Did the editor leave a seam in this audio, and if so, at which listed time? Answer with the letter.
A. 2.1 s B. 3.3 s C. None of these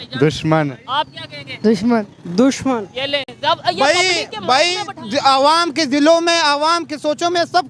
C